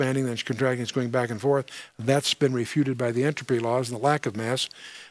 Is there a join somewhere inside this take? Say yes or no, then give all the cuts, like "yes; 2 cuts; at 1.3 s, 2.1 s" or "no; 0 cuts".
no; 0 cuts